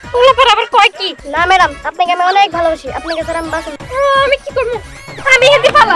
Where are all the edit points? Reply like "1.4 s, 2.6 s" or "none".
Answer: 1.1 s, 3.8 s